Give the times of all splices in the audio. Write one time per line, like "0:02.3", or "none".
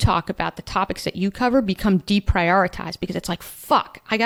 none